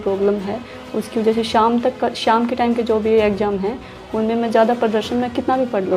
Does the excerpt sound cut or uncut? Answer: uncut